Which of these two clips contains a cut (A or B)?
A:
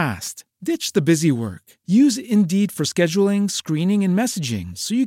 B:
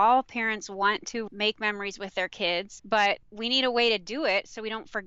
B